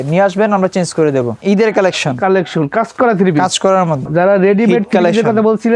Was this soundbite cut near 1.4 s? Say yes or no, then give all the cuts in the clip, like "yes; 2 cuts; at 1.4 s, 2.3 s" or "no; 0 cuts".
yes; 2 cuts; at 1.4 s, 4.0 s